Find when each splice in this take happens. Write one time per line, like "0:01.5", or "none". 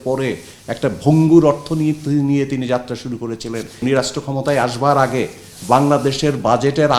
0:03.8